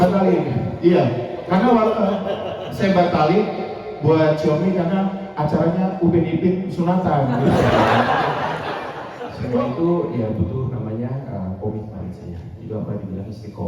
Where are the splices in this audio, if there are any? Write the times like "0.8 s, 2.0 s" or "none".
9.4 s